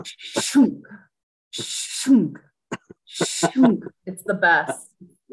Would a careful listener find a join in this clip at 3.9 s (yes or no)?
no